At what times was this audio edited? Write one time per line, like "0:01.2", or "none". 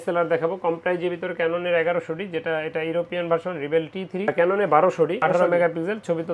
0:04.3